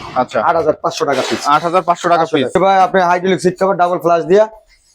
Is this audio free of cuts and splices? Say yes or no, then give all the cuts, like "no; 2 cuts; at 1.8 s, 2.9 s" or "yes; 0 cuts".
no; 1 cut; at 2.5 s